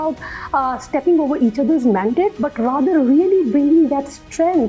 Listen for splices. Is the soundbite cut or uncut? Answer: uncut